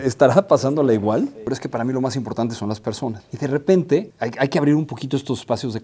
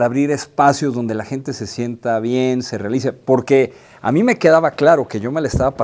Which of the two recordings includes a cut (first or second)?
first